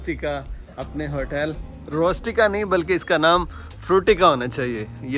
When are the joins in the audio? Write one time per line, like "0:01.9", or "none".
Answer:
none